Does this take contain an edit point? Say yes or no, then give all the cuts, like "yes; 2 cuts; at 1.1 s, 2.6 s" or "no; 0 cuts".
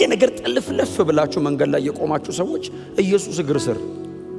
no; 0 cuts